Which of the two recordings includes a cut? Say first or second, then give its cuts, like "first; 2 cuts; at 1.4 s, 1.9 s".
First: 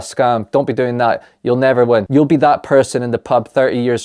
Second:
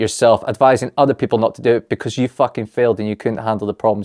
first; 1 cut; at 2.1 s